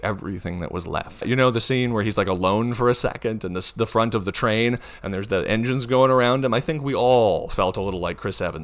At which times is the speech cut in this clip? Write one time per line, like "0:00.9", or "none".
0:01.2